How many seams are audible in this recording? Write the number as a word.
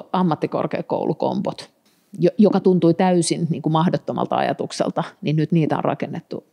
zero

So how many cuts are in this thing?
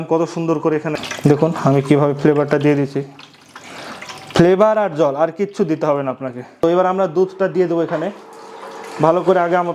two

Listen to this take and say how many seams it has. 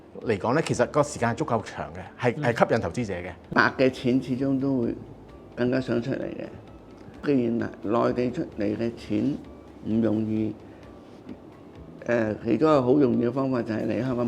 two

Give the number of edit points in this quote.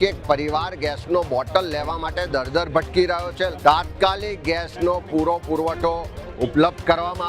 one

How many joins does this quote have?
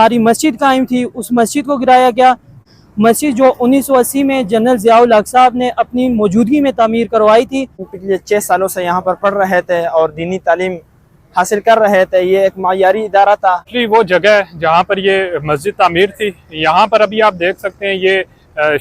three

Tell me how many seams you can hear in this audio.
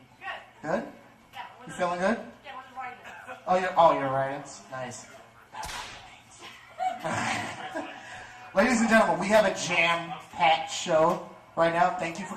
one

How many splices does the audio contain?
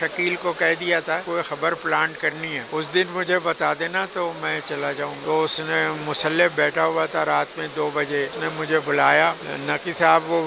five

